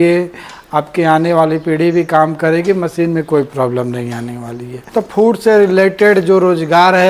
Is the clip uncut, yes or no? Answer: no